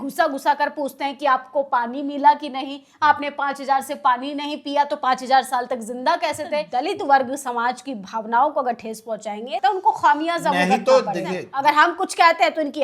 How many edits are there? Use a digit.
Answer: 3